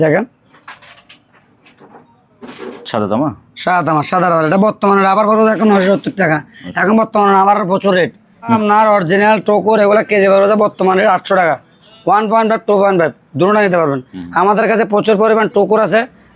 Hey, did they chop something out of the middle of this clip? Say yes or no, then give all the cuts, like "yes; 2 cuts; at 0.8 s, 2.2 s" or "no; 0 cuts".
yes; 1 cut; at 8.6 s